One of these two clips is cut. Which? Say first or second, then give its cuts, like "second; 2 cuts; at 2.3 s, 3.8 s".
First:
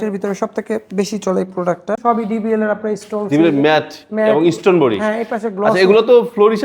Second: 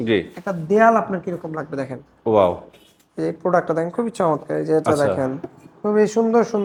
first; 1 cut; at 2.0 s